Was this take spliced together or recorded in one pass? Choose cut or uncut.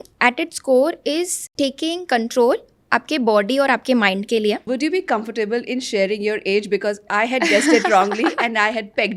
cut